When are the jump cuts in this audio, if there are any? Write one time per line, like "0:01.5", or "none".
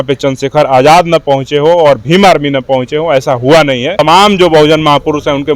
0:03.9